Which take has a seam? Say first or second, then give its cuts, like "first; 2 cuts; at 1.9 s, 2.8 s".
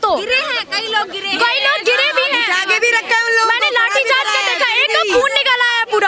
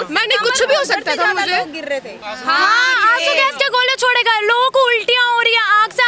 second; 1 cut; at 2.2 s